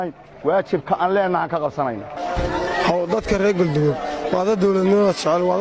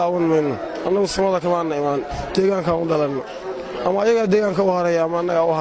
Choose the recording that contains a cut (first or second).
first